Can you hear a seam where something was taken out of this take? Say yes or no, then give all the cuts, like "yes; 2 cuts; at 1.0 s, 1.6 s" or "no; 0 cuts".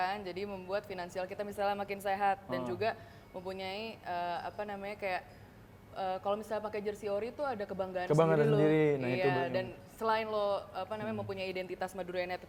no; 0 cuts